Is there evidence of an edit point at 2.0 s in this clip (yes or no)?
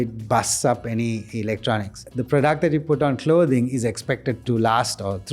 yes